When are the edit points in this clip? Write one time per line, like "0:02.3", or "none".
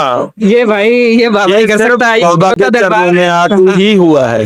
none